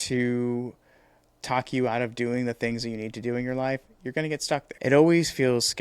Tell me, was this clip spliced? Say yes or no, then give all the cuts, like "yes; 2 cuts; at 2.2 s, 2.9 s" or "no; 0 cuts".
yes; 1 cut; at 4.7 s